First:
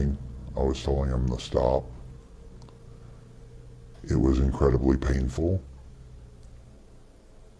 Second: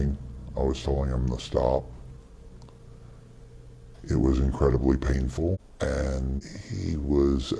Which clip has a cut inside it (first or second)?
second